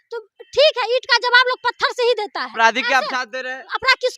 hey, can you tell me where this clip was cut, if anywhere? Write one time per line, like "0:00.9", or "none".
0:02.5